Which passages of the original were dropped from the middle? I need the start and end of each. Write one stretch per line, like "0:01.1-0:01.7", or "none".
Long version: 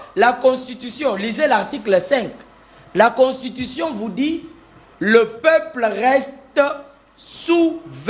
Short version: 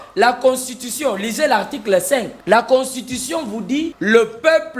0:02.3-0:02.8
0:04.4-0:04.9